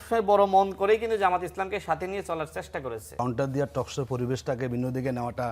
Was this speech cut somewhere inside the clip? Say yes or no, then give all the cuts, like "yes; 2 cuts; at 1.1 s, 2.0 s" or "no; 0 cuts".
yes; 1 cut; at 3.2 s